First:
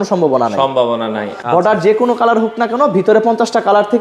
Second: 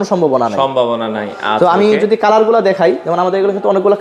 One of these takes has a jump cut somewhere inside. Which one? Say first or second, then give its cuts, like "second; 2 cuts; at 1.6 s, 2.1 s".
first; 1 cut; at 1.3 s